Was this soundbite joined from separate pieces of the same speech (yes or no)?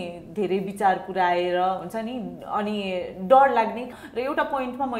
yes